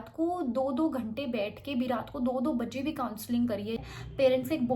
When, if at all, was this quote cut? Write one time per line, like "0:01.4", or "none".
0:03.8